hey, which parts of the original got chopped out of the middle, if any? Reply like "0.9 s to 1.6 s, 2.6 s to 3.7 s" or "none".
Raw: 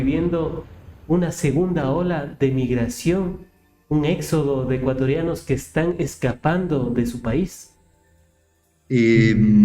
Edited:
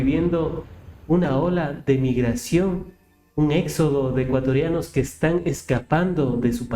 1.3 s to 1.8 s